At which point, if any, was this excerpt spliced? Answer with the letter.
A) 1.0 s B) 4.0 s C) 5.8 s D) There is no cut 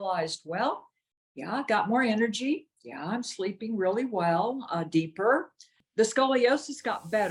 C